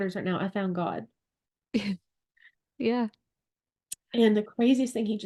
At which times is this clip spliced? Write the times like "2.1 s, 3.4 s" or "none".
none